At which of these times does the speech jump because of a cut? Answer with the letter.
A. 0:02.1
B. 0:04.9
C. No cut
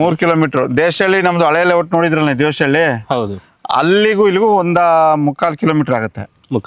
C